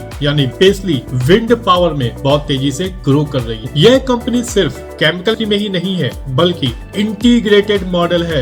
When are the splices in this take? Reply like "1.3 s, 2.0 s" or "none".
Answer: none